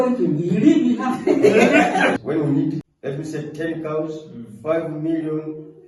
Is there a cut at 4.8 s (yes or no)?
no